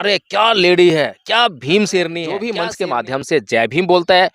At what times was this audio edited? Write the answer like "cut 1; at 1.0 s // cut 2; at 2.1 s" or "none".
cut 1; at 2.5 s